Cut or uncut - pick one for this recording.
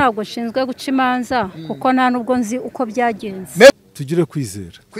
cut